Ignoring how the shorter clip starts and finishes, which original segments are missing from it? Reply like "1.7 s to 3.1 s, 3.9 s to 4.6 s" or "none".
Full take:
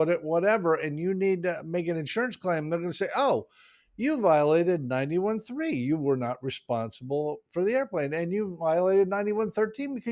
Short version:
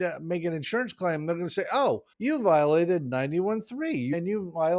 3.5 s to 3.9 s, 5.9 s to 8.2 s

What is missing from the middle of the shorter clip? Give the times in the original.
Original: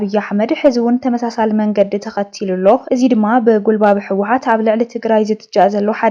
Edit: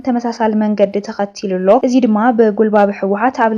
2.8 s to 2.9 s

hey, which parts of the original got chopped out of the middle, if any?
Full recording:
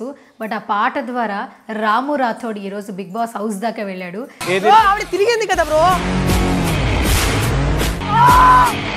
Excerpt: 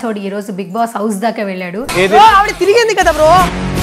4.2 s to 4.4 s

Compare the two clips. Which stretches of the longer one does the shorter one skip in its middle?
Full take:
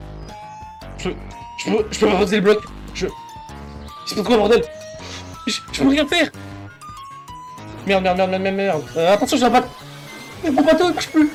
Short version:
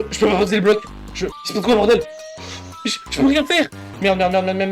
3.2 s to 4.0 s, 6.5 s to 7.7 s

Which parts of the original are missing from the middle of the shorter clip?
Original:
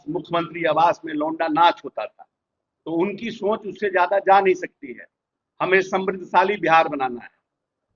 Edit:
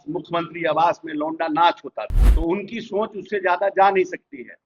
2.2 s to 2.7 s

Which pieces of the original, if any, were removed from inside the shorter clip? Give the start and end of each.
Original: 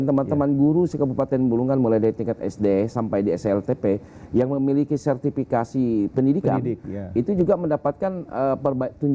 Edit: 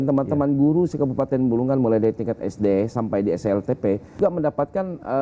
4.2 s to 7.5 s

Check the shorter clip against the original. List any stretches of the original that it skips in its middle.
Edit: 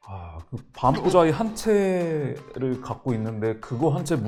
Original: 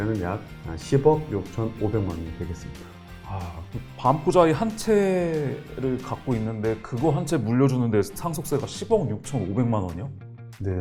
none

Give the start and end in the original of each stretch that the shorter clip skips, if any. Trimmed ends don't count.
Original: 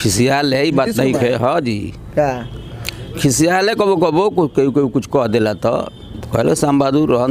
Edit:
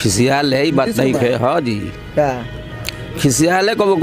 none

